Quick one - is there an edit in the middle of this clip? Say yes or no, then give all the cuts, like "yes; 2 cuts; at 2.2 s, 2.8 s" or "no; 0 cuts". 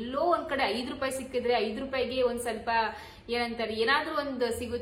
no; 0 cuts